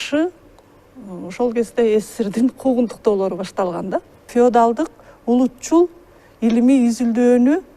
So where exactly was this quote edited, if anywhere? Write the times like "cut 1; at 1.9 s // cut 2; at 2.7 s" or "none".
cut 1; at 4.3 s